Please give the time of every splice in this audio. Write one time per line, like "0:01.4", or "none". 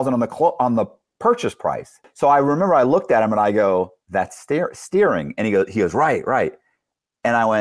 0:02.1

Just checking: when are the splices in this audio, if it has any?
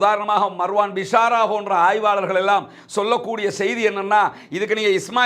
none

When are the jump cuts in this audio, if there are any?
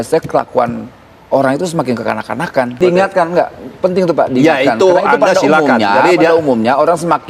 0:02.8

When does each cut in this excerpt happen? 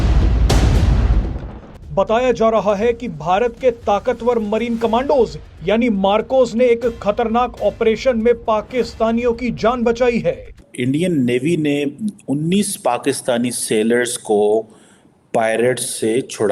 0:01.7
0:10.5

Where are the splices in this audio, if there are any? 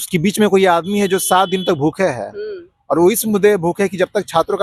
none

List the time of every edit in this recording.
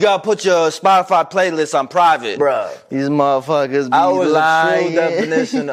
0:02.3

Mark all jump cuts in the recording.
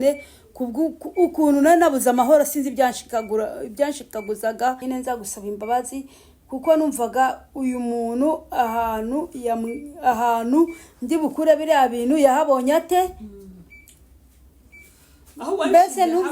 0:04.8

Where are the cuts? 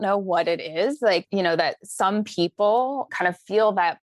0:01.3
0:03.1

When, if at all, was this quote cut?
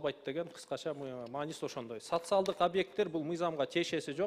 none

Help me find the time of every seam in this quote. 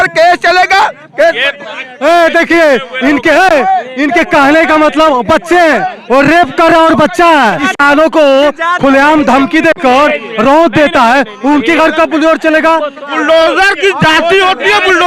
0:07.7
0:13.0

